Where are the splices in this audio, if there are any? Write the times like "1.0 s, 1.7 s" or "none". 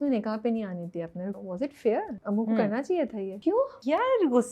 1.4 s, 2.2 s, 3.3 s